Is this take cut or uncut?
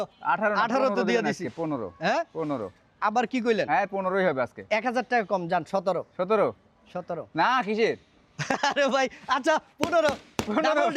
uncut